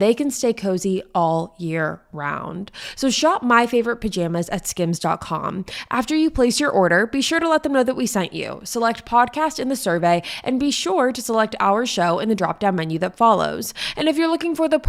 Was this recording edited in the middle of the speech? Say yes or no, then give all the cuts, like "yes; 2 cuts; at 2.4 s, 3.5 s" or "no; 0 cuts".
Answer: no; 0 cuts